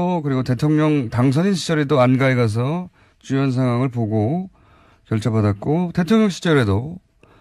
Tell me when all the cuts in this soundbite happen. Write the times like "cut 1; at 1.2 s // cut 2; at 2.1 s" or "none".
cut 1; at 4.9 s